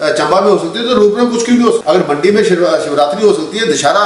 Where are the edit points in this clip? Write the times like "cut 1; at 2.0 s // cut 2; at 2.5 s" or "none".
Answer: cut 1; at 1.8 s